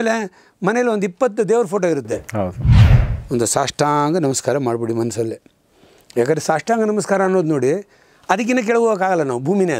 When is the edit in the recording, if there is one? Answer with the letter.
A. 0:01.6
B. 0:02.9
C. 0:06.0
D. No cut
B